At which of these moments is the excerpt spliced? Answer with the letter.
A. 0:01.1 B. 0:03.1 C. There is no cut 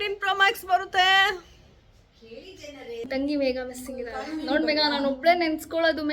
B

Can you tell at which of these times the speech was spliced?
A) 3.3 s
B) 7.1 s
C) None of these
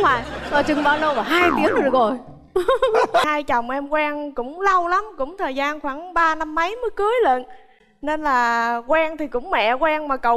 A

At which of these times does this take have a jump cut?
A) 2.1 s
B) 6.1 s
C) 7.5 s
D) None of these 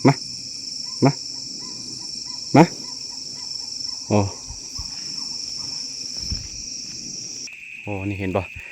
C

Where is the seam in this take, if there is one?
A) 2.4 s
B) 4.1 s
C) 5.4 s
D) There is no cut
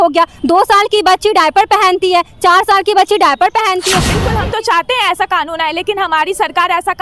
B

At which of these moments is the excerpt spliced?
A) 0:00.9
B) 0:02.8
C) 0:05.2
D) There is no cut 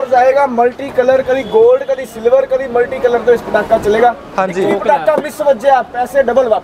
D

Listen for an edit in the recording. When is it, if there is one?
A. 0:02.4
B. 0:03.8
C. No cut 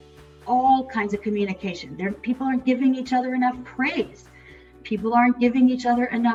C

